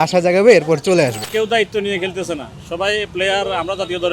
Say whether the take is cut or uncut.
cut